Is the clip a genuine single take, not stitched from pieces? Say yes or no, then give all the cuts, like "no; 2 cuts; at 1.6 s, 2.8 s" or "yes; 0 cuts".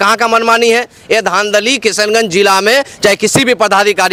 yes; 0 cuts